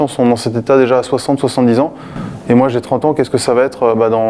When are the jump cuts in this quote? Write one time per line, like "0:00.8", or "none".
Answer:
none